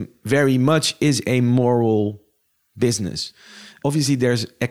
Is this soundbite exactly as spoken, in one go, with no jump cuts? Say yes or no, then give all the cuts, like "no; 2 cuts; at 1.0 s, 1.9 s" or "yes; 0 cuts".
no; 1 cut; at 3.7 s